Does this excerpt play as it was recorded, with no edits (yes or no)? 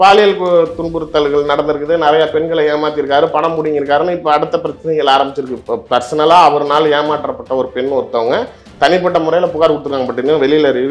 no